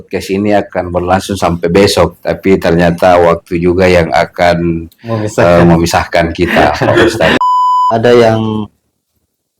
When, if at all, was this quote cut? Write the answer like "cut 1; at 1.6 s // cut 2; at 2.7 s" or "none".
cut 1; at 7.8 s